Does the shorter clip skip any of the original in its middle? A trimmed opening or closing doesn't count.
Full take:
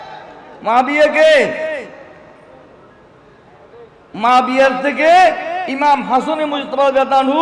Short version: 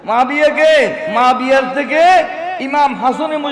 yes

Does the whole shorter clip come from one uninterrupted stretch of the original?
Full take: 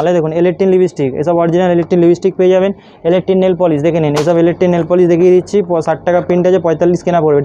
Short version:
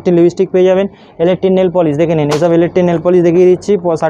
yes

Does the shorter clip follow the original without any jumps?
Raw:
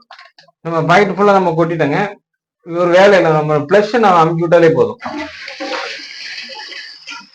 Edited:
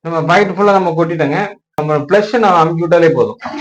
no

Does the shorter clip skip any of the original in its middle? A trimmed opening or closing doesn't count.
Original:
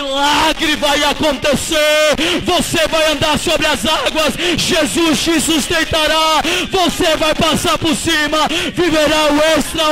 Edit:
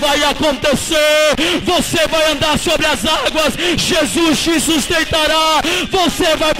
no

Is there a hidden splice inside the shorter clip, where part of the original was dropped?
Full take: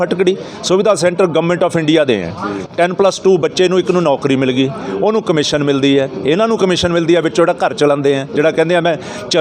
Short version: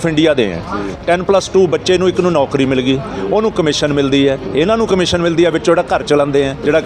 no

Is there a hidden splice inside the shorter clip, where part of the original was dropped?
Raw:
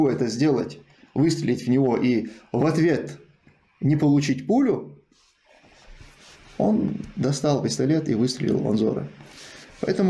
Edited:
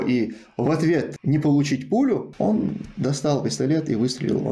yes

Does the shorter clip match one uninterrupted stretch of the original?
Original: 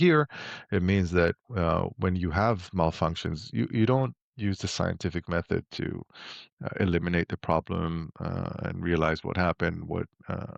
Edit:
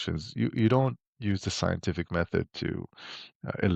yes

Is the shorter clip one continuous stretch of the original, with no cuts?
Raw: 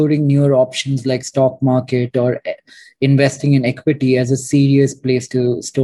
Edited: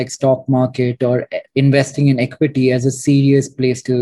no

